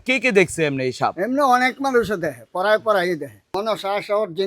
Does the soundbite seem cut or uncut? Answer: cut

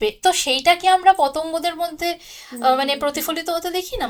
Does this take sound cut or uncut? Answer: uncut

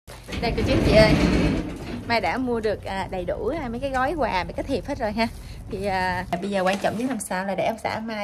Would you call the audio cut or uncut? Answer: cut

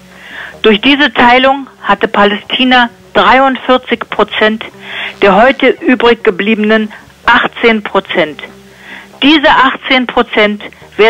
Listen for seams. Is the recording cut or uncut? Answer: cut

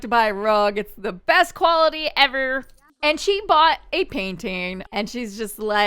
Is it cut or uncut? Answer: cut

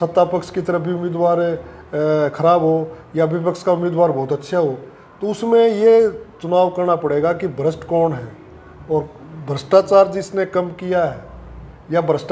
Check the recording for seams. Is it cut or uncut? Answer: uncut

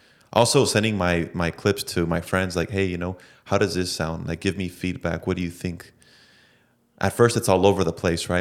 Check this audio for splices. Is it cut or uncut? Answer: uncut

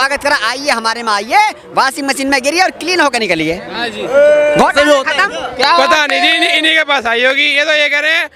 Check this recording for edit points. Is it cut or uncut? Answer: uncut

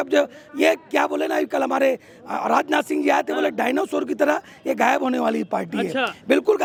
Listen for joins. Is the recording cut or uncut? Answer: uncut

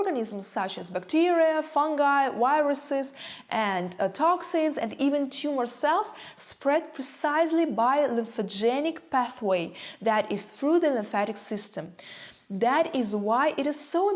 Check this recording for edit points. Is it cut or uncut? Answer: uncut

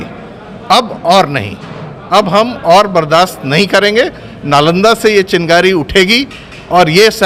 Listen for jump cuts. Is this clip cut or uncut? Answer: uncut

